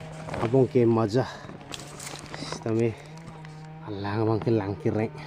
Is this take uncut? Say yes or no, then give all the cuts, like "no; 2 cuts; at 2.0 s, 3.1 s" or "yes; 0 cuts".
yes; 0 cuts